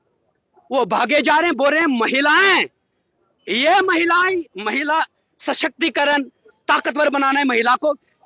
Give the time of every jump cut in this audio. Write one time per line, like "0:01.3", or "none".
none